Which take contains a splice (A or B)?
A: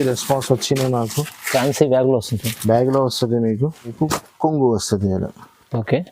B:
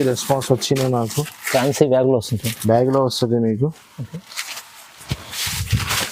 A